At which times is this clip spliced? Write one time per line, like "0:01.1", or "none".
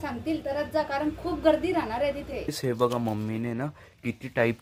0:02.5